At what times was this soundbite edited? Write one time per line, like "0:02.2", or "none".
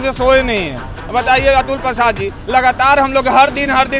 none